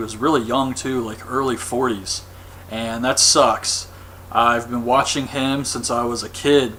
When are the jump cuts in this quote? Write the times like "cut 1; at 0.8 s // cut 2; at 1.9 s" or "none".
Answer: none